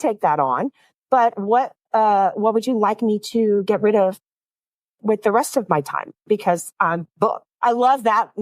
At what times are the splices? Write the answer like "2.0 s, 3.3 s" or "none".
7.4 s